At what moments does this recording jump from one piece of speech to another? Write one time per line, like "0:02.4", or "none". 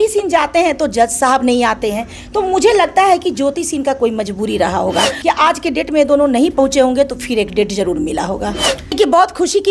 0:05.1
0:08.9